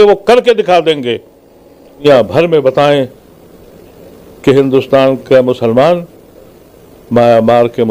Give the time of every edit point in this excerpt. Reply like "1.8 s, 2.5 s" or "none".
2.0 s